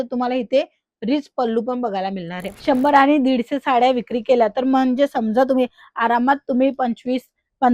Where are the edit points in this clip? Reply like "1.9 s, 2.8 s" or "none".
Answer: 2.6 s